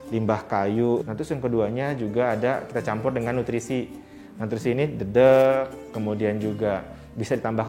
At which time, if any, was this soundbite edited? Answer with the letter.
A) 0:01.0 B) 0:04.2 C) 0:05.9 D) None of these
A